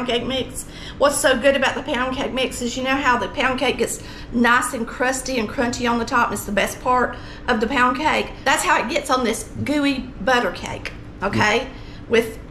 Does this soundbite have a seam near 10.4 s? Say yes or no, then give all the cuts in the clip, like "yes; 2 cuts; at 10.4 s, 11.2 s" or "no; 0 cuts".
no; 1 cut; at 8.3 s